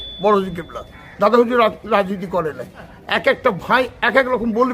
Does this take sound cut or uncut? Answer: cut